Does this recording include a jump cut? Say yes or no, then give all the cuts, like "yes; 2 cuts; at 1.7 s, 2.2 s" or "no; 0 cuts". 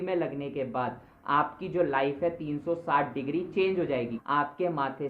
yes; 1 cut; at 4.1 s